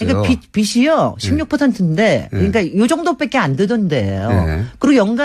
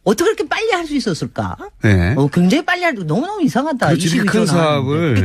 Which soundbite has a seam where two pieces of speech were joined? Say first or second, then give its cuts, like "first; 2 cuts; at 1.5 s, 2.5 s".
second; 1 cut; at 1.9 s